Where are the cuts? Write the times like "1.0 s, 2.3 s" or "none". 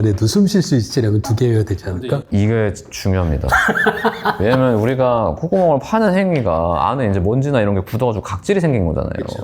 none